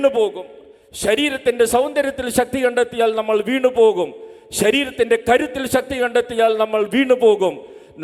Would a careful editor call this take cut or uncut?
uncut